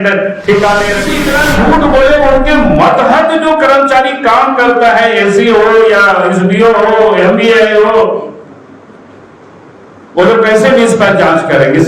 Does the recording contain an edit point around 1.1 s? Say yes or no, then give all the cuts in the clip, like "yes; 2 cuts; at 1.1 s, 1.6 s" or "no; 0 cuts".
yes; 1 cut; at 1.1 s